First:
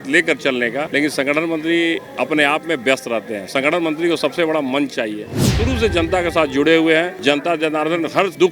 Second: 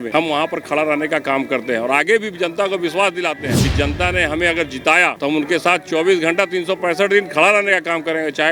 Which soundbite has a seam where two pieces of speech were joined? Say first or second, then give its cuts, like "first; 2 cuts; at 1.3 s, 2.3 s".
first; 2 cuts; at 5.5 s, 7.1 s